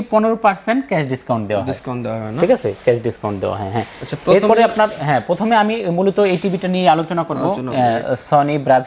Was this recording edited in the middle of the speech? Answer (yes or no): no